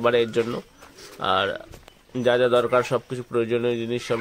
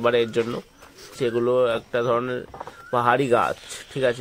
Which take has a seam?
second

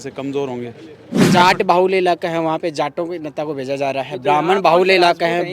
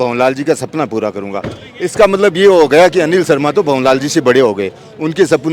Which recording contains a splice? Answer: first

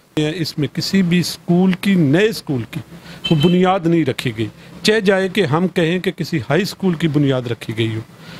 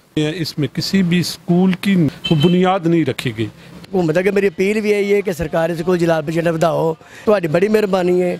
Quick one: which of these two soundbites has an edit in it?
second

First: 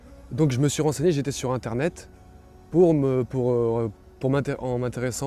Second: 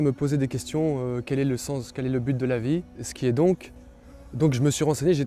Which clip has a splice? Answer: second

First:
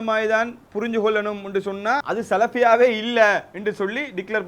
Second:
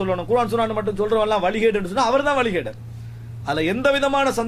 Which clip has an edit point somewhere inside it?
first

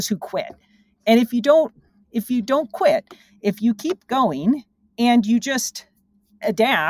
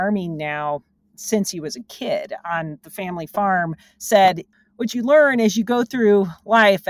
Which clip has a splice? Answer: second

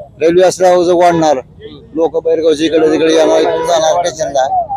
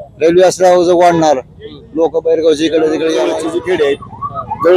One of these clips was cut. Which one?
second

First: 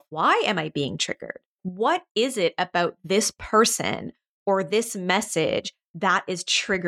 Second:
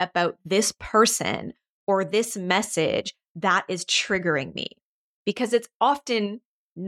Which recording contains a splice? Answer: first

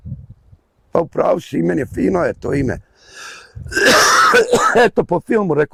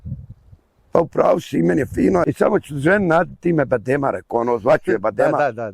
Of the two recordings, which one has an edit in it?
second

